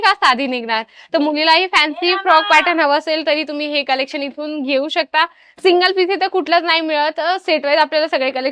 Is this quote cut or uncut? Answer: uncut